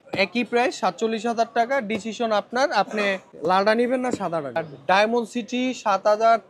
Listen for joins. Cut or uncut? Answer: cut